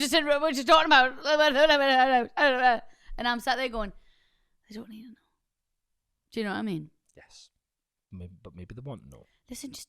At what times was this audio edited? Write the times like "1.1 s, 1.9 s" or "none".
none